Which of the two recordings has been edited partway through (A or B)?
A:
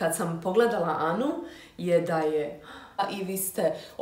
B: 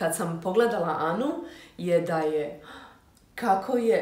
A